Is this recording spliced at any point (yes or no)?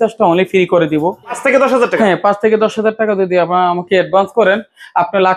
yes